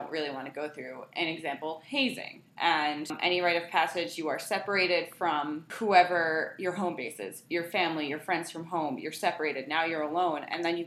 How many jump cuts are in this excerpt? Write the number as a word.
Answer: two